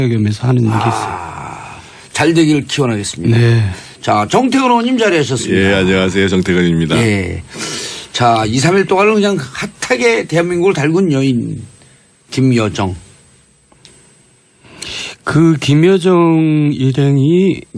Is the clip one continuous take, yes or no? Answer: yes